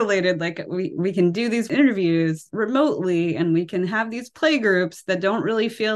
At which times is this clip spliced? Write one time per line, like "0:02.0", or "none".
0:01.7
0:02.4